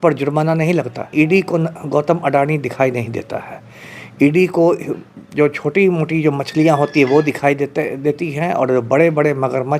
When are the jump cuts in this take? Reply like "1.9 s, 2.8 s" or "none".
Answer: 1.1 s